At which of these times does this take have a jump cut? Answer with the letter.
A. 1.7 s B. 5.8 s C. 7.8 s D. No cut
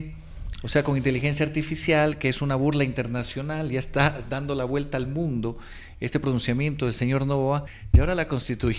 C